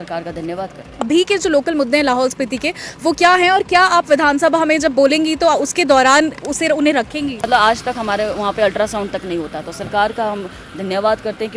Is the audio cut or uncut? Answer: cut